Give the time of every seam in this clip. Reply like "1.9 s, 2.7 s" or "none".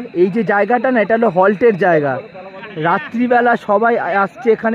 none